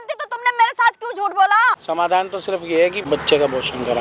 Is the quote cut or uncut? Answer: cut